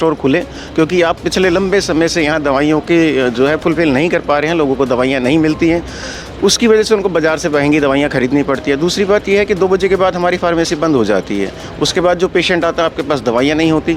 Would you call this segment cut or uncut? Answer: uncut